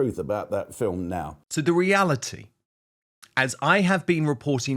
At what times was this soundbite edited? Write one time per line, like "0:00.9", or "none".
0:01.4